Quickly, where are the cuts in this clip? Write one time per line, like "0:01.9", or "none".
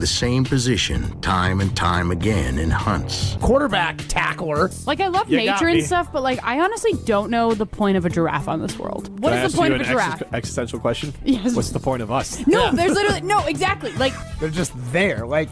none